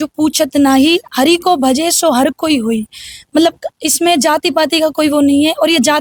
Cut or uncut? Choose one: uncut